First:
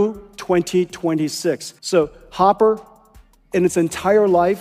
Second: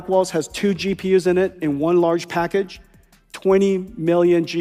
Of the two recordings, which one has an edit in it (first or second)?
first